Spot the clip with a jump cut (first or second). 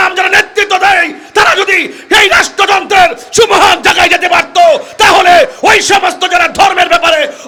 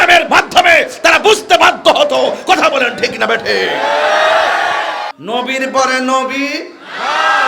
second